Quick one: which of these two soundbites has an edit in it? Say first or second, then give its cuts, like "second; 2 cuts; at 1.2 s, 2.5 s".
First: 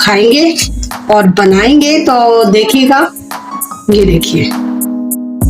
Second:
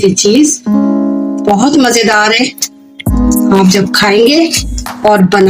first; 1 cut; at 4.4 s